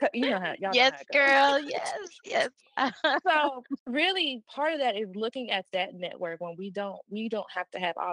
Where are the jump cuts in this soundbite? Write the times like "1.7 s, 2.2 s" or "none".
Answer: 3.7 s